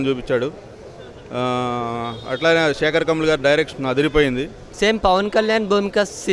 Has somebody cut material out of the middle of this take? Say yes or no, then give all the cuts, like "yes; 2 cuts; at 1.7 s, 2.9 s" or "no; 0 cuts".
yes; 1 cut; at 4.6 s